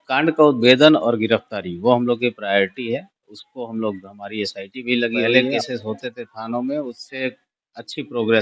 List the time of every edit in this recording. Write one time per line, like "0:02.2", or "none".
0:05.3

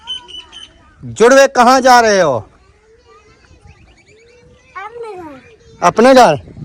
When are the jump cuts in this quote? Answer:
none

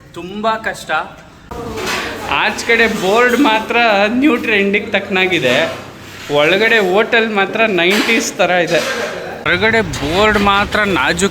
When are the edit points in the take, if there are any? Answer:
0:01.4
0:09.3

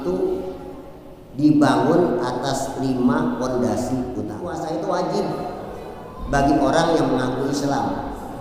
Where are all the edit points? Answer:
0:04.5

